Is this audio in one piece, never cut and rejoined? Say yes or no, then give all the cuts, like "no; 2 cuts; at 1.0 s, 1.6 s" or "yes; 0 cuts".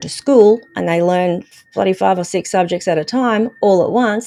yes; 0 cuts